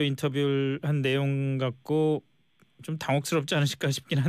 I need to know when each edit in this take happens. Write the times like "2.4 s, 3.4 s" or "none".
none